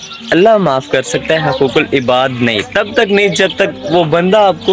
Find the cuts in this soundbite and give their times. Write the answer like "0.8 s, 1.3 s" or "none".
none

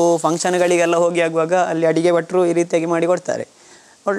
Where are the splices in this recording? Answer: none

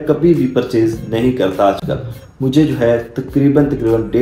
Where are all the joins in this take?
none

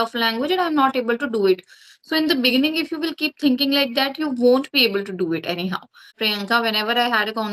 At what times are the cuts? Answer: 6.2 s

